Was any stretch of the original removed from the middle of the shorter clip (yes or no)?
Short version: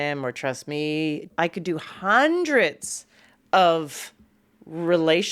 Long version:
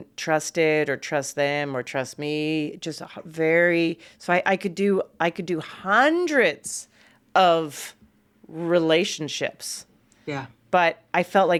yes